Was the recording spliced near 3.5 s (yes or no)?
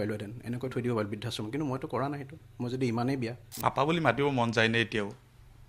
yes